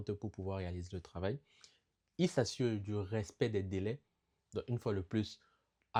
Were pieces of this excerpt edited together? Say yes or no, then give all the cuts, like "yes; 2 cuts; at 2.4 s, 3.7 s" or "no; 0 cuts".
no; 0 cuts